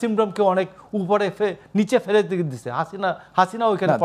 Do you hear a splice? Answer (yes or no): no